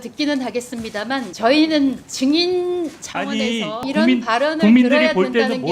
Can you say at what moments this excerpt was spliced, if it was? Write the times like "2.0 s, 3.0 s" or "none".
1.3 s, 2.1 s, 3.9 s